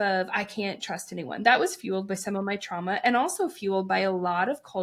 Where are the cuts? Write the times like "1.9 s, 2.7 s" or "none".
none